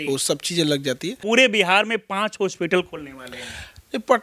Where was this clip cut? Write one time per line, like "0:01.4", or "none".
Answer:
0:01.2